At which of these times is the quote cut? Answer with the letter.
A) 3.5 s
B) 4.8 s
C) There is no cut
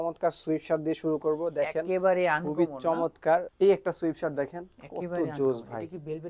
A